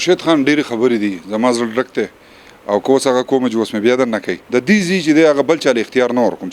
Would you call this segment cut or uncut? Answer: cut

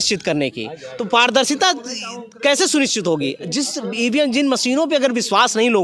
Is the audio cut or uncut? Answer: uncut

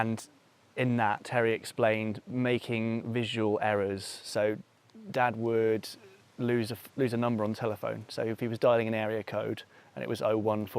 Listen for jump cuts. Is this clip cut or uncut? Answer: cut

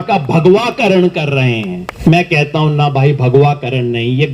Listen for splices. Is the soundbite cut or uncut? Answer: cut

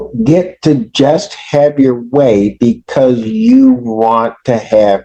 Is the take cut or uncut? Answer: uncut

